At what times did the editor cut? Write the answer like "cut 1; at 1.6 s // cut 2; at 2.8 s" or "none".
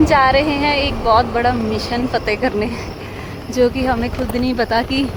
none